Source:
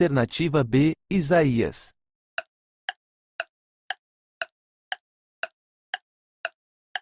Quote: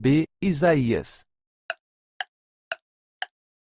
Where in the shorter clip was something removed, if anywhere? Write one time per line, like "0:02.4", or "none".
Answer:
0:01.5